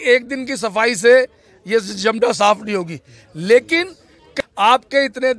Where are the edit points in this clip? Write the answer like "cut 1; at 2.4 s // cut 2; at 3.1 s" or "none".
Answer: cut 1; at 4.4 s

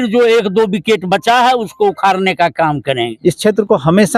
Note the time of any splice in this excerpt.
cut 1; at 3.1 s

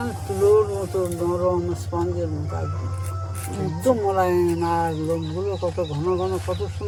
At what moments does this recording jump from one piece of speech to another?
none

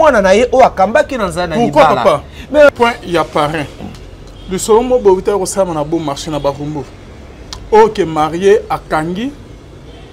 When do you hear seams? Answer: cut 1; at 2.7 s

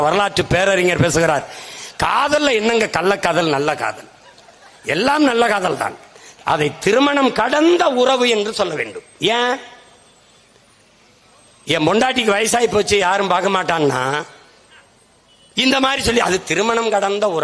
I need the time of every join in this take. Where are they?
none

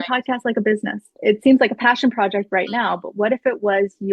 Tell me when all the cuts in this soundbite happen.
cut 1; at 1.1 s

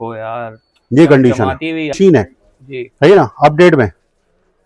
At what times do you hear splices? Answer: cut 1; at 2.0 s

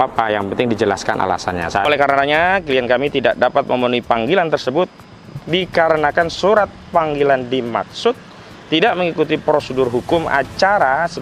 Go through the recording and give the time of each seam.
cut 1; at 1.9 s

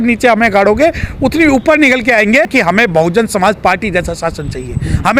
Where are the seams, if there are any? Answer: cut 1; at 2.5 s

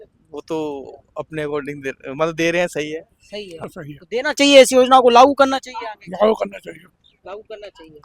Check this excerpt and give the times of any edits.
cut 1; at 3.6 s

